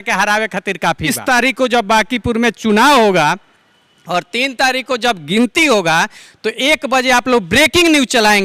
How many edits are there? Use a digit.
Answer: 1